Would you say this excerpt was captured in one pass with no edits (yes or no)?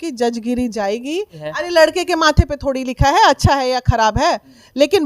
no